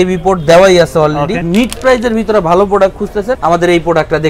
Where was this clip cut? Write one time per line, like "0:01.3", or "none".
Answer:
0:01.4
0:03.4